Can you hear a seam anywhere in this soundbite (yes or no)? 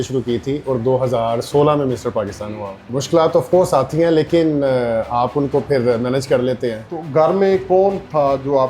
yes